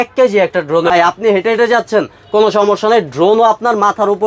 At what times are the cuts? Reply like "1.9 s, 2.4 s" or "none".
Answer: 0.9 s